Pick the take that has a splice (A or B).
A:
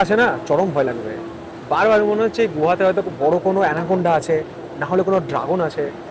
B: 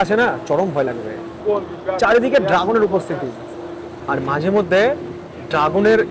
B